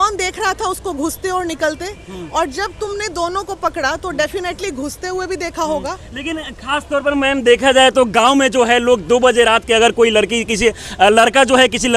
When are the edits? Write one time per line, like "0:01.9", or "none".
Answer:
none